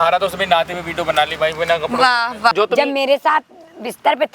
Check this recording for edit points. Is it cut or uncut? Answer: cut